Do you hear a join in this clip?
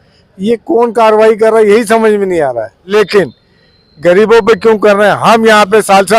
yes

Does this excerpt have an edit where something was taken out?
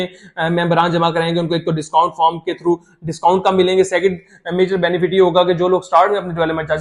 no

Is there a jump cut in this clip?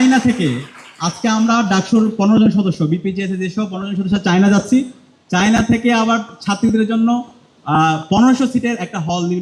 no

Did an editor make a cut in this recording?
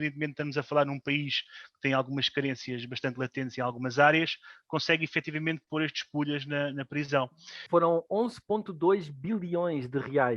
yes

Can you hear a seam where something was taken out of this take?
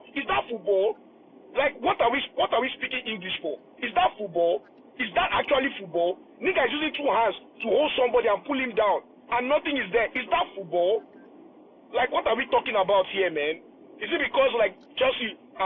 no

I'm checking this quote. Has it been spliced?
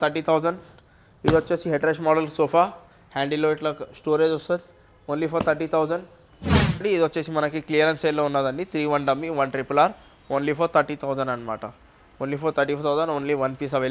no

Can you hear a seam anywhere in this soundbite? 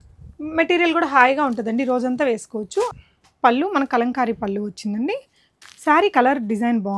yes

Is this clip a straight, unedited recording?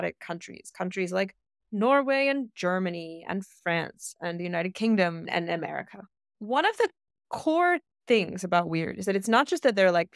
no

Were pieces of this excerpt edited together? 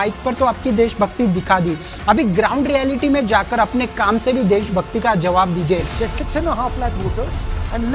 yes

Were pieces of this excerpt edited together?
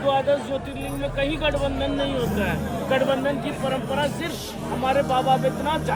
no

